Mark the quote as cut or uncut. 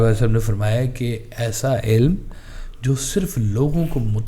uncut